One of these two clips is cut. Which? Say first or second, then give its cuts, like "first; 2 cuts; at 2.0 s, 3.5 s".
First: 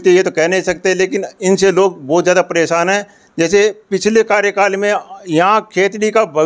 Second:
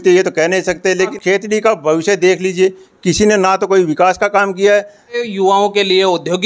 second; 2 cuts; at 1.2 s, 5.2 s